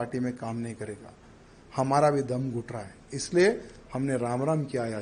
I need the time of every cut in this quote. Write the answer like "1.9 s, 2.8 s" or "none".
none